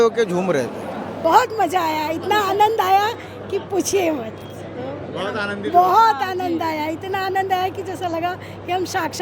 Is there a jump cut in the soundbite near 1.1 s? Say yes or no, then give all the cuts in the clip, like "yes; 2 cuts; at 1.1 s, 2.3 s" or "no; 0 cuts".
yes; 1 cut; at 1.1 s